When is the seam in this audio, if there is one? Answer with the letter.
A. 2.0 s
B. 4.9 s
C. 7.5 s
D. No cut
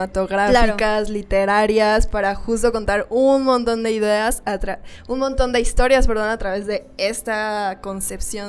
D